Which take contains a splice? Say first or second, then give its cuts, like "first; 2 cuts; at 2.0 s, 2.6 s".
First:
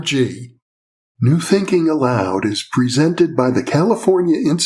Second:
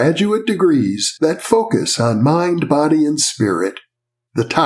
first; 1 cut; at 1.2 s